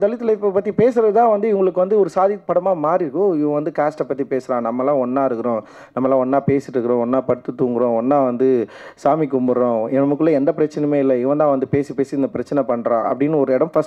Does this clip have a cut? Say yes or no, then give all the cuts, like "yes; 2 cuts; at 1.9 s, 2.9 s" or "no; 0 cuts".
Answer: no; 0 cuts